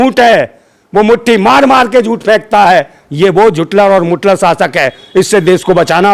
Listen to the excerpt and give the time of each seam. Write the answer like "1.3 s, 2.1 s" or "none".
none